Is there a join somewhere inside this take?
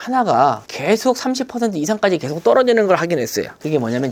no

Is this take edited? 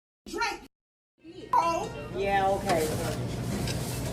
yes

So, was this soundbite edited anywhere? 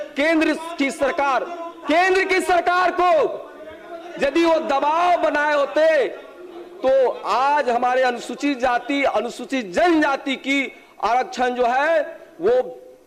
no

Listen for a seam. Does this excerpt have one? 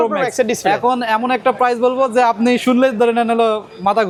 no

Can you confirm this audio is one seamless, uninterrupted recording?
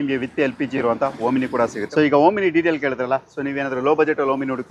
yes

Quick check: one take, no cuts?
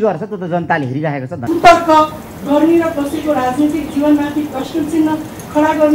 no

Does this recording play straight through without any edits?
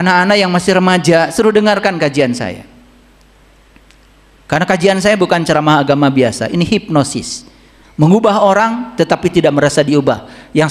yes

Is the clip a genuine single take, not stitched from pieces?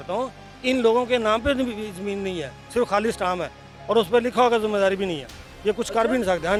yes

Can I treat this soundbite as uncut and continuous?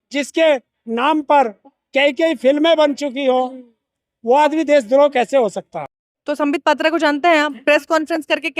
no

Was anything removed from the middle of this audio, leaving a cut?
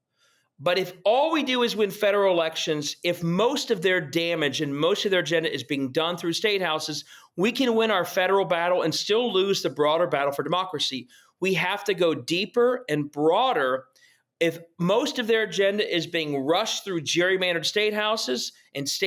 yes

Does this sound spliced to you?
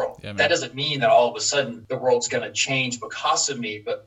yes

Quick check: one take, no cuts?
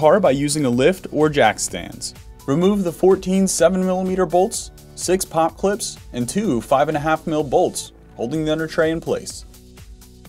yes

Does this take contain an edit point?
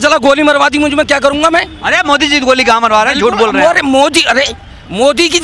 no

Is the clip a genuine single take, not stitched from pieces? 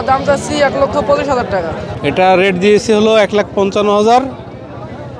no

